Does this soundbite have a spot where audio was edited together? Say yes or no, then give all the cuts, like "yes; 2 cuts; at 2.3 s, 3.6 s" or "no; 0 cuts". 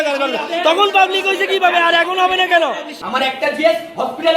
yes; 1 cut; at 3.0 s